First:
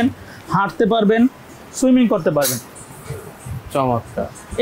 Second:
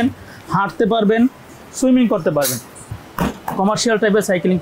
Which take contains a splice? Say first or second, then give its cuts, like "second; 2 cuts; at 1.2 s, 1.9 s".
second; 1 cut; at 3.0 s